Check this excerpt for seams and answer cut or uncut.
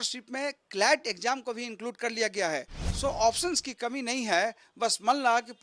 cut